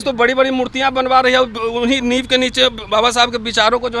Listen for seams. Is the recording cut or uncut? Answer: uncut